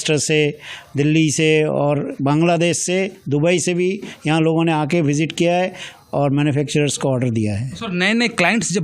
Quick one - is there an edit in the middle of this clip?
no; 0 cuts

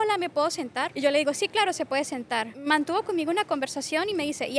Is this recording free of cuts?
no; 2 cuts; at 0.9 s, 2.5 s

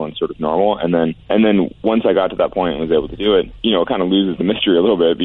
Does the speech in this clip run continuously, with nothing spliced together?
no; 2 cuts; at 1.2 s, 3.5 s

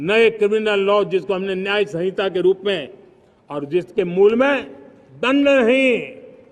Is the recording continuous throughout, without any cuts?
yes; 0 cuts

